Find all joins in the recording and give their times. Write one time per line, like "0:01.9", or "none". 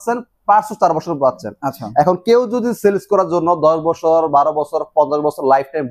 none